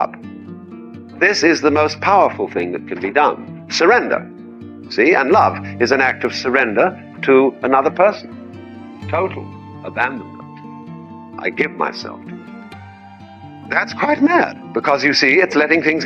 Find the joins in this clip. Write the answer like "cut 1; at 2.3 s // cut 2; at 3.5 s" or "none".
cut 1; at 11.9 s // cut 2; at 13.8 s